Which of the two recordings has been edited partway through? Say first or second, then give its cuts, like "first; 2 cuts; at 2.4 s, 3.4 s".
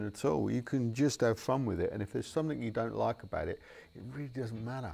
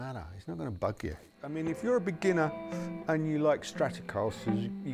second; 1 cut; at 1.4 s